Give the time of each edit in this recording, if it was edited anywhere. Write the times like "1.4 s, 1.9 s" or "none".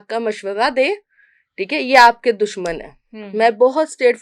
none